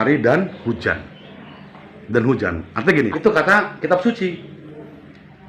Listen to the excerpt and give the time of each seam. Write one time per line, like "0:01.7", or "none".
0:03.1

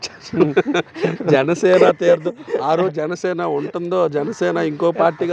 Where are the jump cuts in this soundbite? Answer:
none

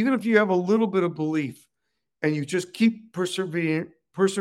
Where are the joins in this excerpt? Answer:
none

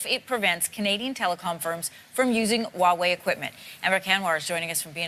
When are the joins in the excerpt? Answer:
none

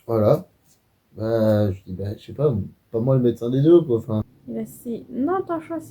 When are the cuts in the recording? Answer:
0:04.4

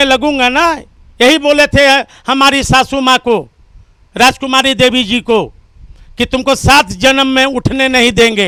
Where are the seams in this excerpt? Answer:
none

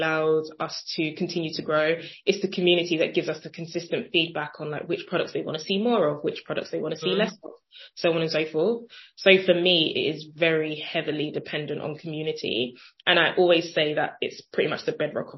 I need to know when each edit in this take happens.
none

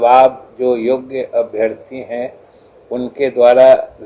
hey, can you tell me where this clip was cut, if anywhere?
none

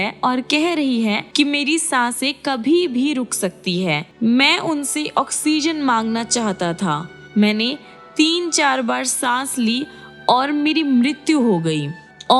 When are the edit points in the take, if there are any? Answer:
0:01.2
0:04.1

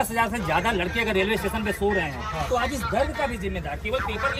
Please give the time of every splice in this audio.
none

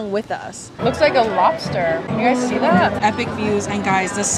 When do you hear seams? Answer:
0:00.8
0:02.1
0:03.0

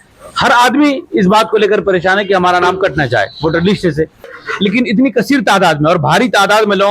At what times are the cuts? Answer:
0:04.4

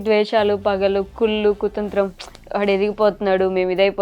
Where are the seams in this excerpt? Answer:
none

